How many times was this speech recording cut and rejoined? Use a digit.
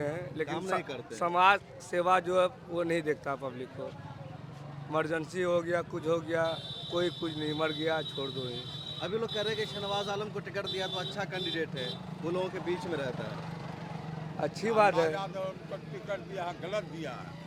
0